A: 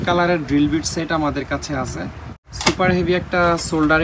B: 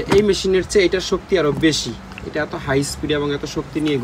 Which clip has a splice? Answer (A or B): A